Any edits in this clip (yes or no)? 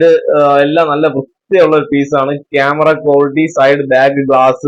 no